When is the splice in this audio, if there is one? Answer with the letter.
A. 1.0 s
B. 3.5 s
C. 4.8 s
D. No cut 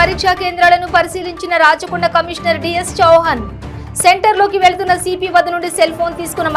D